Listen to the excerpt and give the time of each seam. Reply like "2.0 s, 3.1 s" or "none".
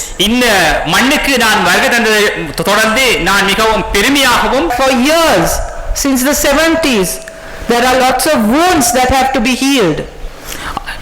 4.7 s